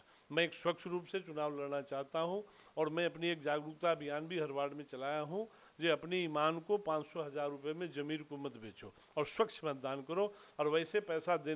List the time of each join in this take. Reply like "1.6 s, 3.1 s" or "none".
none